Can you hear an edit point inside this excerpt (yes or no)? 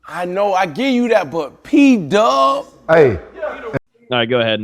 yes